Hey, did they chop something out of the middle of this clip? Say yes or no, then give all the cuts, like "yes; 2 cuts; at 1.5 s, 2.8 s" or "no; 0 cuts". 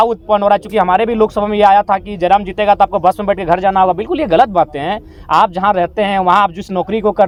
no; 0 cuts